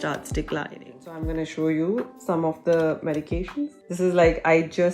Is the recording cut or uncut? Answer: cut